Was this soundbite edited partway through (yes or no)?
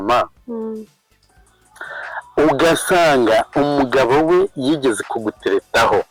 no